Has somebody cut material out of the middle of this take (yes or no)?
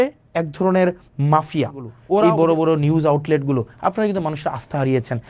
yes